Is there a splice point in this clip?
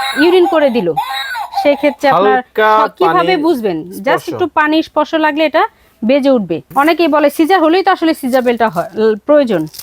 yes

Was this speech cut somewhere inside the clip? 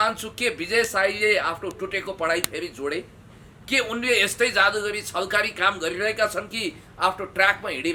no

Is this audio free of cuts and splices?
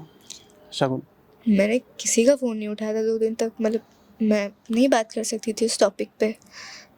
yes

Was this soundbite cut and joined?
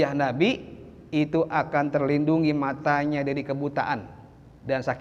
no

